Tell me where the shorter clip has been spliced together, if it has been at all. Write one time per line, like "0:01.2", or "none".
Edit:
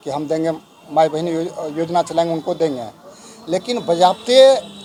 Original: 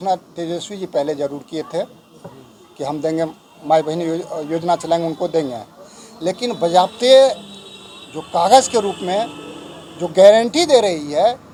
none